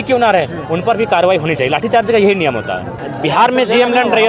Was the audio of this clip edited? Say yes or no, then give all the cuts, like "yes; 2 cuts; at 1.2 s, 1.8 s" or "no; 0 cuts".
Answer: yes; 1 cut; at 2.9 s